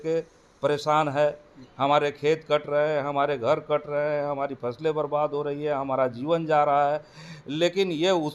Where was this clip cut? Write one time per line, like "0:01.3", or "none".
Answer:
none